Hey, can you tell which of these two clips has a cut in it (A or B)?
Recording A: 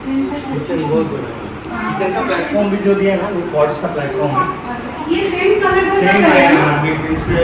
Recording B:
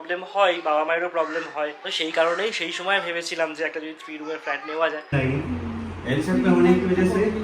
B